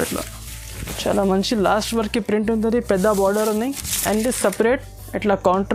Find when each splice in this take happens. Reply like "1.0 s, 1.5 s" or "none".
none